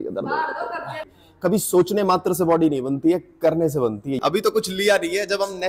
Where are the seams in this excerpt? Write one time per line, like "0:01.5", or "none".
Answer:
0:01.2
0:04.2